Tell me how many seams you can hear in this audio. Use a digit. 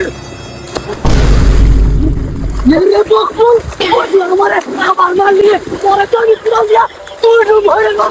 0